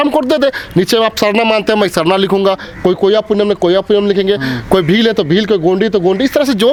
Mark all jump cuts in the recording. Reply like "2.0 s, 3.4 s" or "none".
none